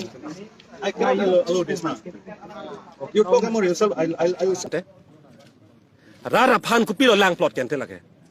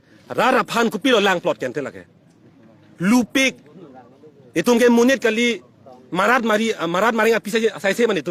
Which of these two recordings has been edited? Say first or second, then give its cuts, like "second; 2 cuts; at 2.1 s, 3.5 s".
first; 1 cut; at 4.7 s